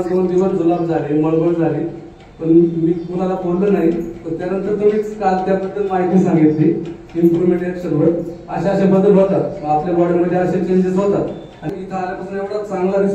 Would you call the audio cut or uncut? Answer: cut